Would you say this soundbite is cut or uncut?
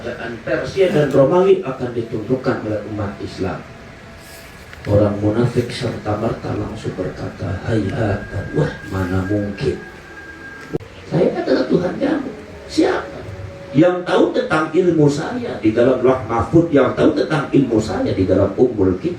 cut